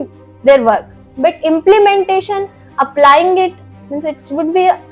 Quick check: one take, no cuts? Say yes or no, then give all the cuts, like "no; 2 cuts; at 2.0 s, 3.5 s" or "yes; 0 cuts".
yes; 0 cuts